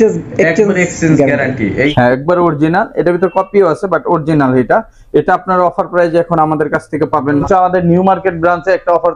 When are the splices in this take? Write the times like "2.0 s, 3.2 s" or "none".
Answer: 1.9 s, 7.4 s